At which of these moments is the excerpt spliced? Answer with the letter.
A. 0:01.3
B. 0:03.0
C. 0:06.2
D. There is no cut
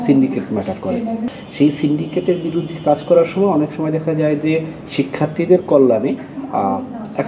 A